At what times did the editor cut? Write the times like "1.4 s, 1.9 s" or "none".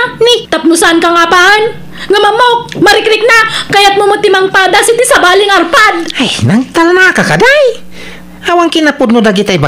3.6 s